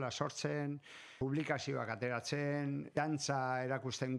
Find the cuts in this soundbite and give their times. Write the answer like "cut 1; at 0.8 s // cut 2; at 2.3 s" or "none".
cut 1; at 1.1 s // cut 2; at 2.9 s